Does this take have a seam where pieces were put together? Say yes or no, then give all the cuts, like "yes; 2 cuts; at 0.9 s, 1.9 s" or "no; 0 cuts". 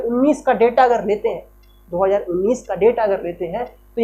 no; 0 cuts